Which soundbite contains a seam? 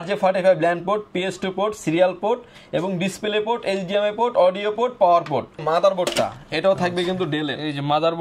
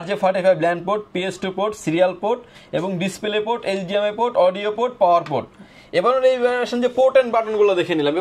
first; 1 cut; at 5.6 s

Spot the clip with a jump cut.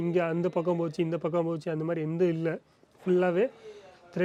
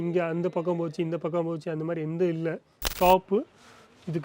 second; 1 cut; at 2.9 s

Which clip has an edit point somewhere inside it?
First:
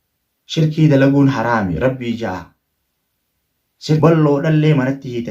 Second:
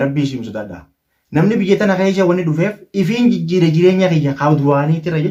first; 1 cut; at 4.0 s

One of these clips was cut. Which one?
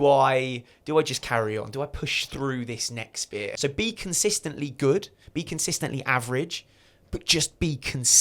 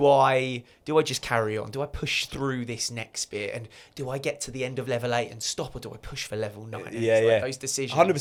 first; 1 cut; at 3.5 s

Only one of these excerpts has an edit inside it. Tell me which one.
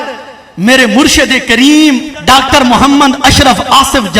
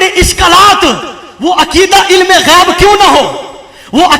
first; 1 cut; at 2.1 s

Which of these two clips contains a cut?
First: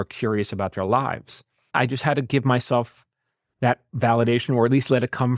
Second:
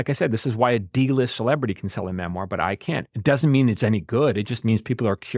first; 1 cut; at 1.7 s

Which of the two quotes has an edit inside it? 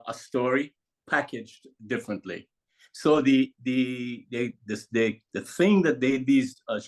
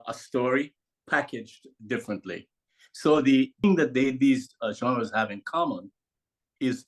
second; 1 cut; at 3.6 s

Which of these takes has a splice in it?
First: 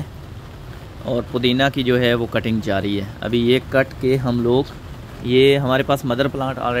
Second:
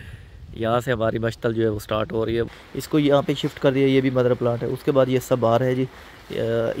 second; 1 cut; at 2.5 s

